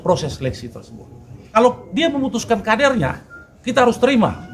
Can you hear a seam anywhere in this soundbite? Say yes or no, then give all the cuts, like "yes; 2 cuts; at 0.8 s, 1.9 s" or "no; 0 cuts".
yes; 1 cut; at 1.4 s